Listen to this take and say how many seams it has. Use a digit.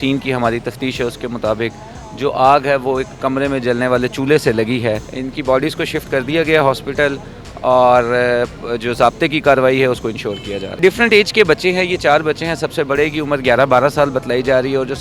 2